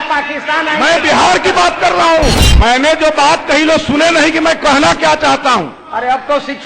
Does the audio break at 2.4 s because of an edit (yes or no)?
yes